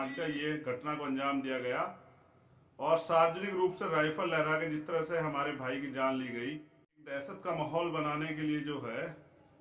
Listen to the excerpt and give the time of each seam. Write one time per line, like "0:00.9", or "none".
0:07.0